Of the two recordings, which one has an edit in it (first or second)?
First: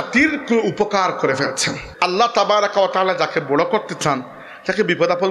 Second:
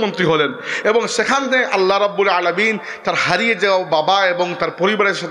first